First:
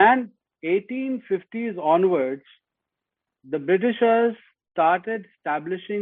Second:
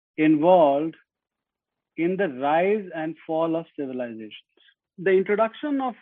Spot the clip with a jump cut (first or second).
second